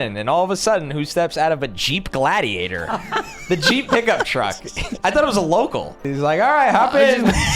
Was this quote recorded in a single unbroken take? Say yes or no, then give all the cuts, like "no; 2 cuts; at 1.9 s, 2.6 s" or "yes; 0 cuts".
no; 1 cut; at 6.0 s